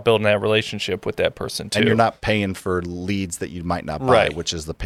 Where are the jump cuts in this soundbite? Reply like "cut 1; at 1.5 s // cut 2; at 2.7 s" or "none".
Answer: none